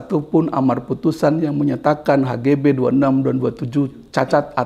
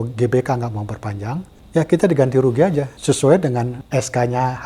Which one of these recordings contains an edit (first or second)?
second